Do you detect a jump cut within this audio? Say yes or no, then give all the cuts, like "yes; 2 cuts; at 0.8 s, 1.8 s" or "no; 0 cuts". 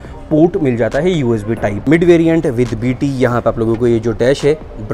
yes; 1 cut; at 1.7 s